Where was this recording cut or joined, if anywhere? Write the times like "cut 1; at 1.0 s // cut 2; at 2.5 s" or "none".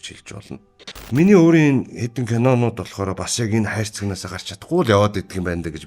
cut 1; at 0.9 s